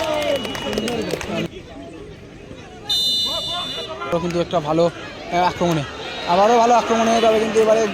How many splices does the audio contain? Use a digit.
2